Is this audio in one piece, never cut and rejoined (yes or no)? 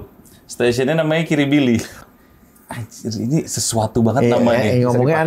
no